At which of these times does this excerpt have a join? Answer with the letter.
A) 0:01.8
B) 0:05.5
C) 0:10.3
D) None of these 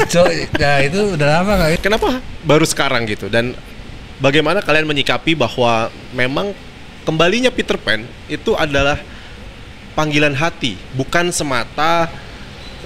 A